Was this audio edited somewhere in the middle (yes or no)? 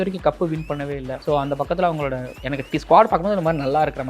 yes